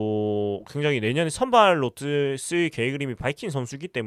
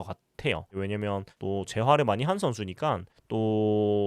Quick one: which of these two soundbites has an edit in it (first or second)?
second